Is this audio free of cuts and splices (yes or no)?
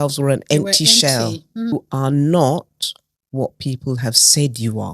no